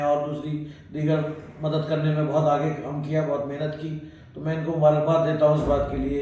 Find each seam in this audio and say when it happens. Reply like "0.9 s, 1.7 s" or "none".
none